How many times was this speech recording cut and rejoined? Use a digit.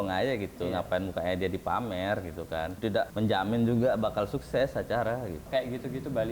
2